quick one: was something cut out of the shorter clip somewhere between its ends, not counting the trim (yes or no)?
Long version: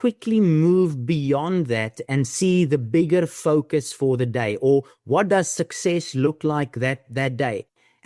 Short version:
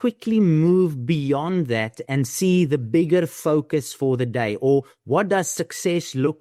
no